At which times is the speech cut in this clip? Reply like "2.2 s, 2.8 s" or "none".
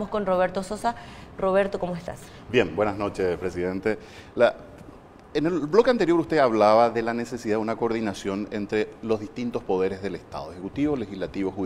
2.7 s